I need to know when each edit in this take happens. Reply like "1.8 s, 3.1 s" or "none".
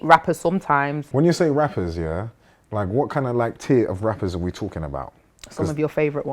1.0 s